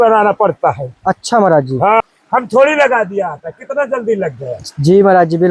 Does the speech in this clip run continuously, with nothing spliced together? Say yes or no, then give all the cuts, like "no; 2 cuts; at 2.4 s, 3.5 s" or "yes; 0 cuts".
no; 1 cut; at 2.0 s